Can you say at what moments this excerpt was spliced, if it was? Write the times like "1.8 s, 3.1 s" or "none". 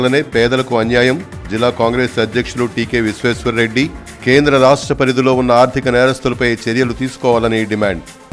none